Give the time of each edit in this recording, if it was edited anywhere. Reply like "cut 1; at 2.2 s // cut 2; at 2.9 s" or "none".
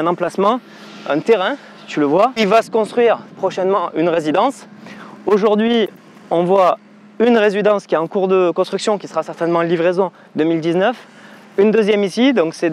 cut 1; at 2.4 s